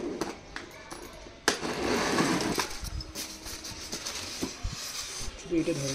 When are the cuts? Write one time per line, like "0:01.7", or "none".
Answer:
0:02.5